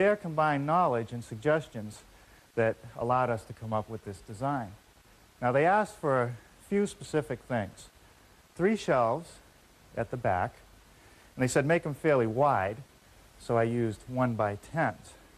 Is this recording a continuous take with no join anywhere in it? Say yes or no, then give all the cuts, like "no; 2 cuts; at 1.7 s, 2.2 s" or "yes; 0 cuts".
no; 1 cut; at 8.0 s